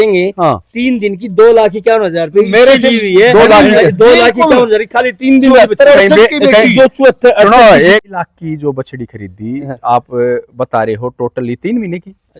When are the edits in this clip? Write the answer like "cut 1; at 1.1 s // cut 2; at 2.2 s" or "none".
cut 1; at 8.0 s